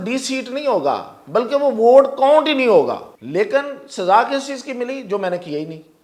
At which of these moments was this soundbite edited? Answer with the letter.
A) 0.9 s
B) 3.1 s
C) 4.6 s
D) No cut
B